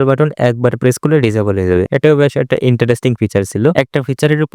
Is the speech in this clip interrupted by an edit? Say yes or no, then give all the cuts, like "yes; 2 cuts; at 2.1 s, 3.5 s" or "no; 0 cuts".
no; 0 cuts